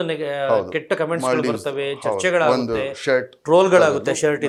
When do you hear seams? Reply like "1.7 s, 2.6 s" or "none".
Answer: none